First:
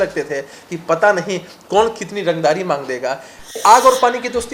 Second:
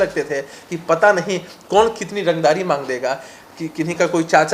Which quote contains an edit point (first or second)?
first